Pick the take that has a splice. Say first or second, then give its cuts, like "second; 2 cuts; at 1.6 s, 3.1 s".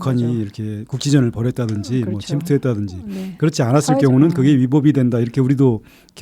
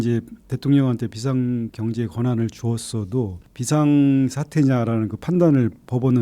second; 2 cuts; at 1.7 s, 3.5 s